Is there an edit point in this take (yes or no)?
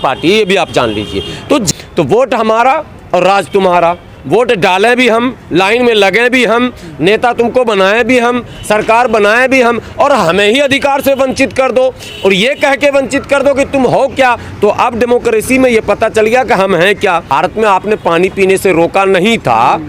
yes